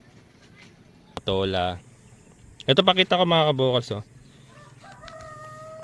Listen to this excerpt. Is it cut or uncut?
cut